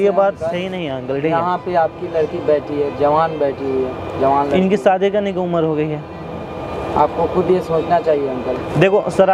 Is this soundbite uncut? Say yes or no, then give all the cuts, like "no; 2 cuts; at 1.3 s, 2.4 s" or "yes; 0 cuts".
yes; 0 cuts